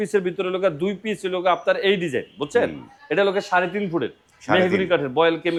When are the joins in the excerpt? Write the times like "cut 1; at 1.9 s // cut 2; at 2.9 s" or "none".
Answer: none